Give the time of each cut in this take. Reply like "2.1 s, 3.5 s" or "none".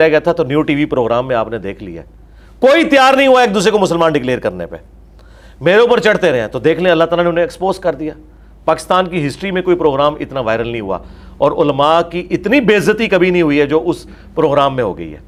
none